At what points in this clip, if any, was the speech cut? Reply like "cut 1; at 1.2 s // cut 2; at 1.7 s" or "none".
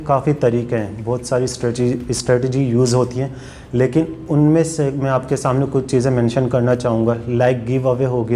none